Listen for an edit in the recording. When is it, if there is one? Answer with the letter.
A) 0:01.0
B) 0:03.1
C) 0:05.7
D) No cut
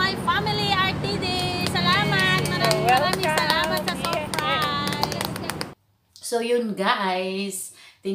C